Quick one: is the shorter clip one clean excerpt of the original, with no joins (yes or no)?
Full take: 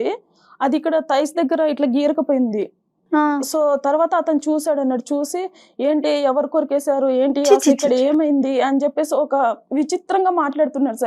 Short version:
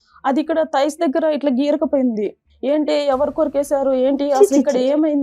no